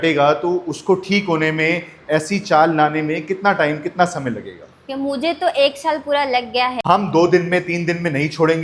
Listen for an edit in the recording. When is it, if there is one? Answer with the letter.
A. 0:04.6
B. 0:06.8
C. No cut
B